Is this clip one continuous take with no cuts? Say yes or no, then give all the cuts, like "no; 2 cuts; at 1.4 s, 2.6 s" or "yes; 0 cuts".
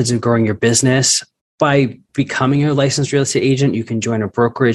no; 1 cut; at 2.0 s